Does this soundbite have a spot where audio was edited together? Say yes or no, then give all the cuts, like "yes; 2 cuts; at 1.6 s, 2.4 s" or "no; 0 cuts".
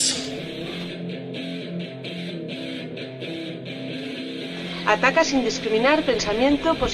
no; 0 cuts